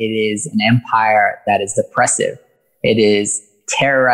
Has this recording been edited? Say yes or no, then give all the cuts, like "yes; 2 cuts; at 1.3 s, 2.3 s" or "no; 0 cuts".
no; 0 cuts